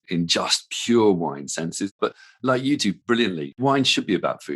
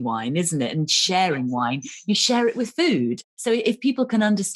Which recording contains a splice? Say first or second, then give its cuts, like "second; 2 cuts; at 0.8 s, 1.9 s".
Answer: first; 2 cuts; at 1.9 s, 3.3 s